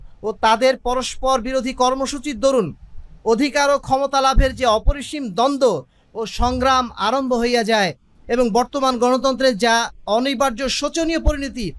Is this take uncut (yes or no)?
yes